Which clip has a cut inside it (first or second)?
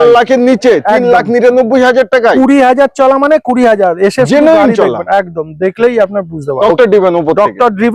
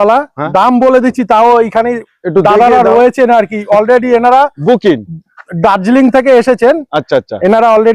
first